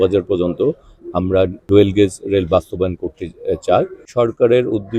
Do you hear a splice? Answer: yes; 2 cuts; at 1.6 s, 4.0 s

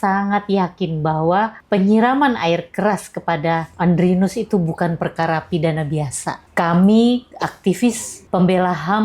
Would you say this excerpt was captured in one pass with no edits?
no; 4 cuts; at 1.6 s, 3.7 s, 6.4 s, 8.1 s

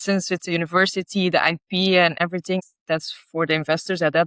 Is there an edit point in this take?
yes; 1 cut; at 2.3 s

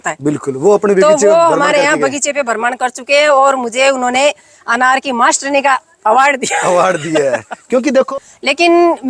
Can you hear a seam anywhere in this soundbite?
yes; 1 cut; at 8.1 s

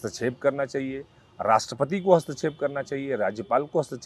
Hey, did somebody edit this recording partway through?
no; 0 cuts

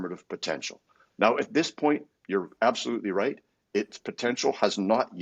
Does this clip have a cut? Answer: no; 0 cuts

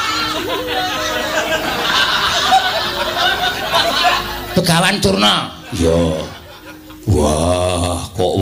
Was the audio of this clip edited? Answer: no; 0 cuts

